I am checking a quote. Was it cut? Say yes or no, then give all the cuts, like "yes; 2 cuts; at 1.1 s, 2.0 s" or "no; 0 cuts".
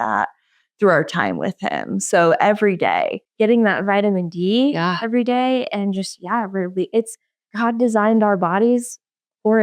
yes; 1 cut; at 3.2 s